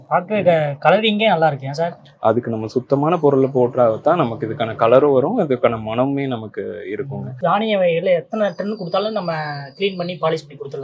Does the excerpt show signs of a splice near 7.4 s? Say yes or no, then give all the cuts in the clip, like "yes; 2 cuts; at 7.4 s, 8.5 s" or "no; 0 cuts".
yes; 1 cut; at 7.4 s